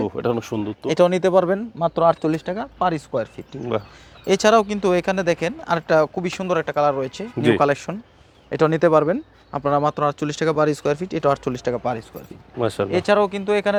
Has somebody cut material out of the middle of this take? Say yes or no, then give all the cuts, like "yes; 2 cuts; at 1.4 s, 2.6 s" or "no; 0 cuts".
no; 0 cuts